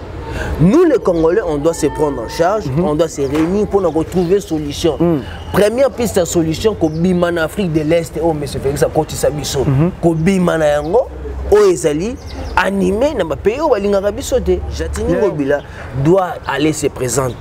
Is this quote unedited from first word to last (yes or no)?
no